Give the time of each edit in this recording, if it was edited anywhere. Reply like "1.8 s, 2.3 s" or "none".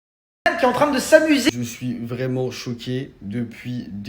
1.5 s